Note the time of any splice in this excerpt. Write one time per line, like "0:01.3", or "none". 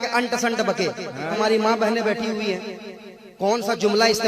0:01.3